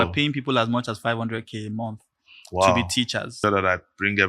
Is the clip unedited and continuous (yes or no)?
no